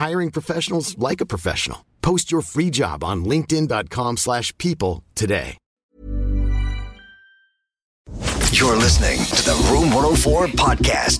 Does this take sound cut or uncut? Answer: cut